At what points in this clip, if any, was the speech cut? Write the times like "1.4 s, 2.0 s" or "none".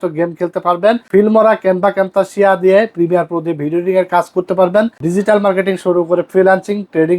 1.1 s, 5.0 s